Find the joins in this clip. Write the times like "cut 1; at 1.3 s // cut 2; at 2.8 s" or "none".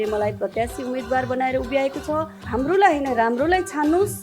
cut 1; at 2.4 s

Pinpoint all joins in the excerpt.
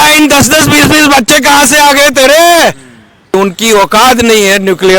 cut 1; at 3.3 s

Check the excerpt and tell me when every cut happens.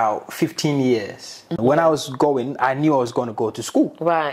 cut 1; at 1.5 s

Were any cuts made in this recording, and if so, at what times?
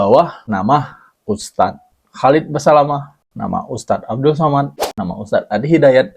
cut 1; at 3.2 s // cut 2; at 5.0 s

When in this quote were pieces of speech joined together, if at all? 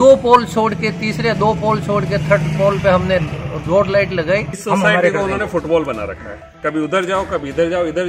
cut 1; at 4.5 s

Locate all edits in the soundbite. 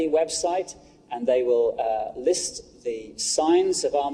none

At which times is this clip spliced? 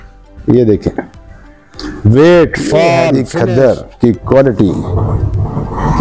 cut 1; at 3.2 s

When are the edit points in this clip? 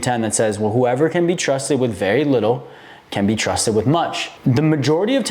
cut 1; at 4.3 s

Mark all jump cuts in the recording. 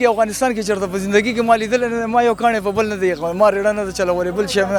none

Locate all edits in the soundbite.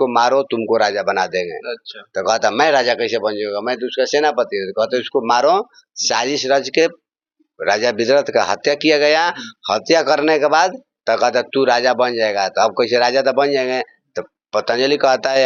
none

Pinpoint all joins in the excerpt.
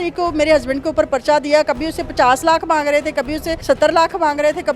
cut 1; at 3.5 s

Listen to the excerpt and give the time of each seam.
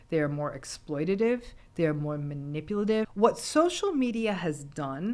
cut 1; at 3.1 s

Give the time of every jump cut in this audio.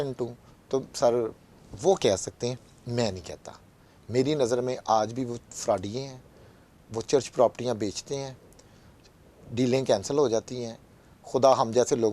none

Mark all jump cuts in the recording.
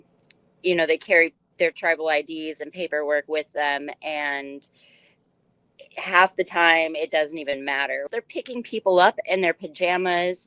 cut 1; at 8.1 s

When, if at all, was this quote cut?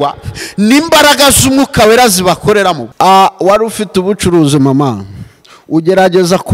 cut 1; at 2.9 s

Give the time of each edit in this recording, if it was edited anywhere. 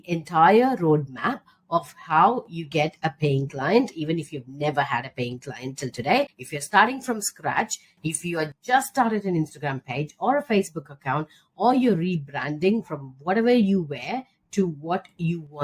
none

